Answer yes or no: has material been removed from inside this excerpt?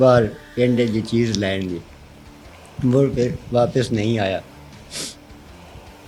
no